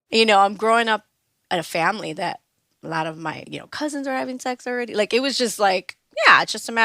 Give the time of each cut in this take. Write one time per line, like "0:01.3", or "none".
0:01.4
0:03.5